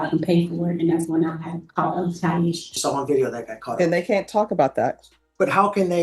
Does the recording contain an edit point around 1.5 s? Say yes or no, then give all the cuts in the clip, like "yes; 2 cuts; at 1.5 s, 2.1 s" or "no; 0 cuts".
no; 1 cut; at 2.7 s